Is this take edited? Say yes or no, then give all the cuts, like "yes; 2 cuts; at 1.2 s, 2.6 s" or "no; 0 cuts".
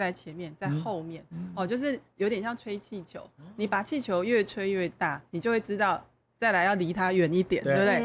no; 0 cuts